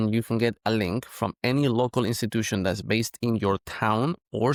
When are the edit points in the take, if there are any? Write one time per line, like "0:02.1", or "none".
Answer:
none